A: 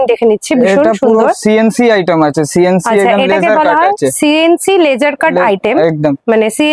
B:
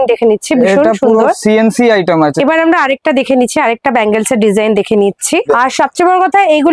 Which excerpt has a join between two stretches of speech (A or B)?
B